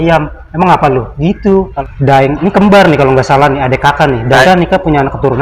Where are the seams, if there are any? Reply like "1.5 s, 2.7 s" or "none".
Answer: 1.8 s, 4.4 s